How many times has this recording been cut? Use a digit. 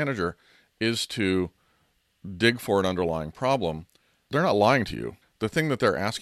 2